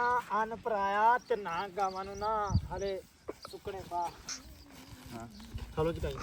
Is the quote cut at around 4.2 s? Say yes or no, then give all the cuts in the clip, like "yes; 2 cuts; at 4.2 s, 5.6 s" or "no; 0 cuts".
yes; 1 cut; at 4.2 s